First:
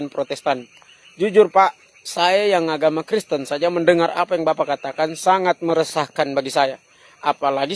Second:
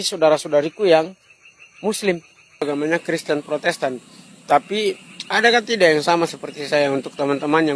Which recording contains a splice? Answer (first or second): second